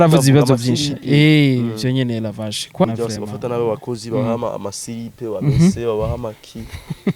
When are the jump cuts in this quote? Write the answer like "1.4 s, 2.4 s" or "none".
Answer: 2.8 s